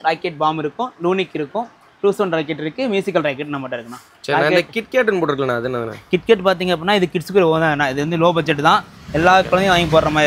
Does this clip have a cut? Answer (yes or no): no